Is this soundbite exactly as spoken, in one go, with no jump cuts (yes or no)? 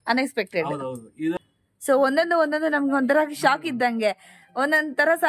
no